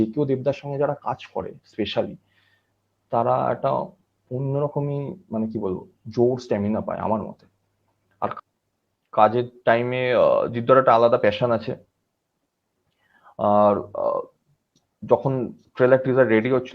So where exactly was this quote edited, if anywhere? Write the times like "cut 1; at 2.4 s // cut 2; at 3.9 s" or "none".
cut 1; at 8.4 s